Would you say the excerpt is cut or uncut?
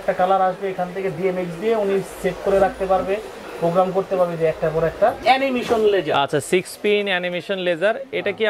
cut